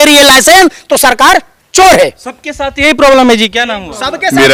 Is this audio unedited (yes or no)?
yes